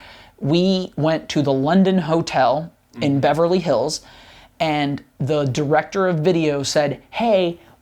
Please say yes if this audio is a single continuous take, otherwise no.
yes